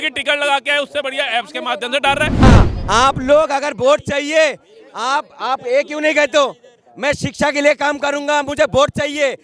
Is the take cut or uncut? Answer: cut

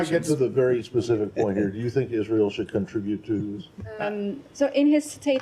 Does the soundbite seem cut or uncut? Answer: cut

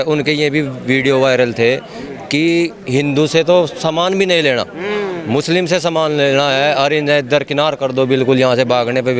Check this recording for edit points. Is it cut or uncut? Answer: uncut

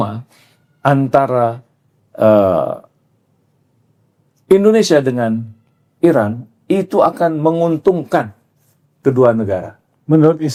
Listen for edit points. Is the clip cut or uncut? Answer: uncut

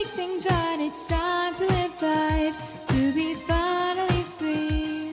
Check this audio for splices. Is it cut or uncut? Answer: uncut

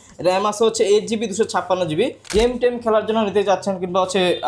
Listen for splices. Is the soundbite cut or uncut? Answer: cut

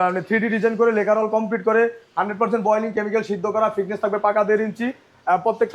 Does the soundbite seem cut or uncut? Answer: uncut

